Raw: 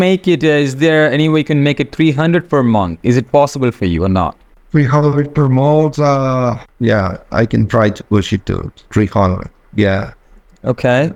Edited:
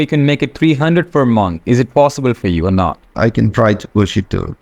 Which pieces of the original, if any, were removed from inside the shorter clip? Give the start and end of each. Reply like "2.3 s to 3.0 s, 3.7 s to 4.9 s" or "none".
4.4 s to 7.2 s